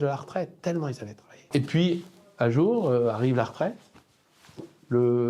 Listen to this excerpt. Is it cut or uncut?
cut